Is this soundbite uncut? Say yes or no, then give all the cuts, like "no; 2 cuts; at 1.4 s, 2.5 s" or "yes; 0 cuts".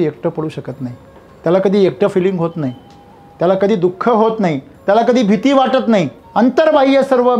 no; 1 cut; at 6.2 s